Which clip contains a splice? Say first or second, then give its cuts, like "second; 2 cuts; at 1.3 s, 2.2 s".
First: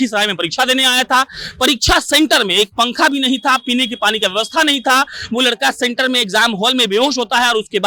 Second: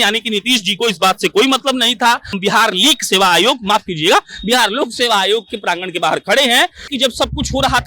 second; 2 cuts; at 2.4 s, 6.9 s